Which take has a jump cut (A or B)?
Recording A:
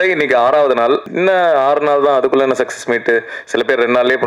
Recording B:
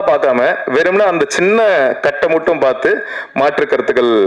A